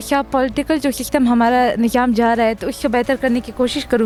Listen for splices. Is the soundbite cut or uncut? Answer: uncut